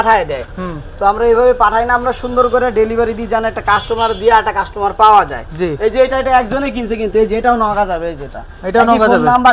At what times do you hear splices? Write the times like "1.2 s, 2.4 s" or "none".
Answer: none